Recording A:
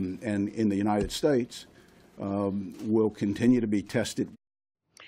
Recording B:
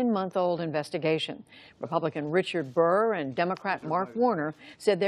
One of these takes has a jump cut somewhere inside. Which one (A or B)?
B